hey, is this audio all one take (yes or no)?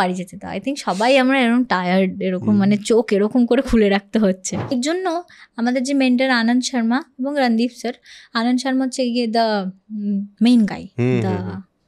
no